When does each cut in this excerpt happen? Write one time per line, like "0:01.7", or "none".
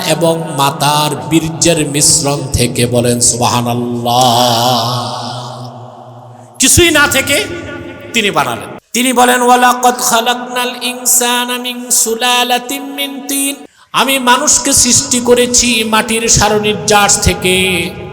0:08.7
0:13.7